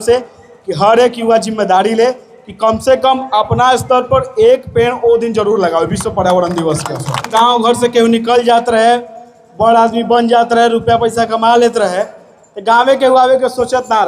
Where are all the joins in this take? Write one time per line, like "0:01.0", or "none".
0:07.3

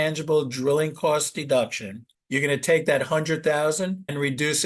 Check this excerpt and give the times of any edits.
0:02.1

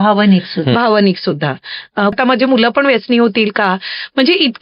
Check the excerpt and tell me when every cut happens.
0:02.1

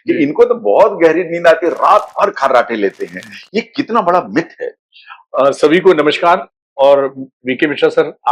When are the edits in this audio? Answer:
none

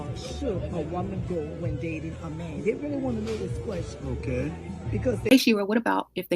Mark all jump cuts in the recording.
0:05.3

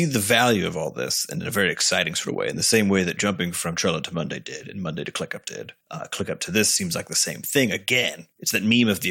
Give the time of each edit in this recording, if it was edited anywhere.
none

